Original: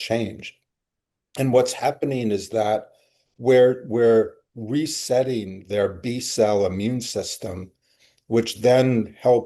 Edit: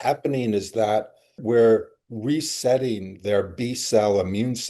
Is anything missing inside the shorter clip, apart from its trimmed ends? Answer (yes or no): yes